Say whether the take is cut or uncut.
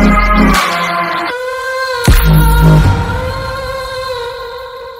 uncut